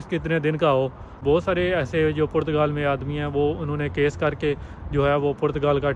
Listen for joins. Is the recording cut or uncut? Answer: cut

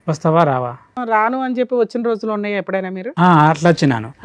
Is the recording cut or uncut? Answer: cut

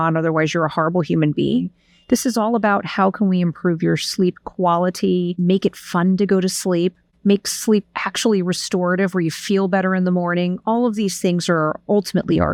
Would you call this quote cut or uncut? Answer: uncut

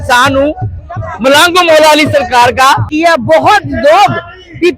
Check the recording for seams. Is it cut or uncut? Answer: cut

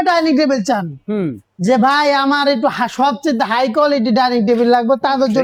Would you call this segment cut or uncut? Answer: uncut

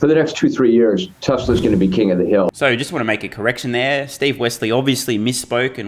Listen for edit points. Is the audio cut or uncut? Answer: uncut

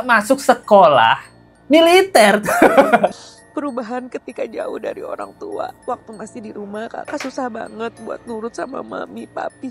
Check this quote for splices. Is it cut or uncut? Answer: cut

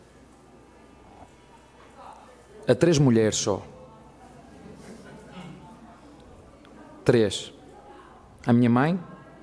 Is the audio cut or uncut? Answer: uncut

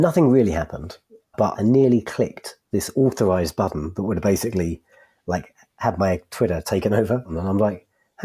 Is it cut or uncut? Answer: cut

